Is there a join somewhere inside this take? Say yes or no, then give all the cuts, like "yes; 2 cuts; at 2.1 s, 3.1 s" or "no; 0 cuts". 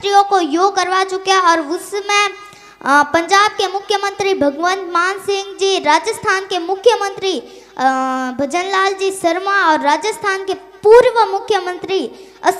no; 0 cuts